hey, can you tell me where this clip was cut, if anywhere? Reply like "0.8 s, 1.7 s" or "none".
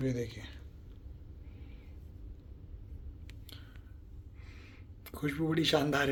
none